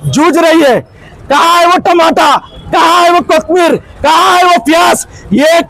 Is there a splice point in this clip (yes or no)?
yes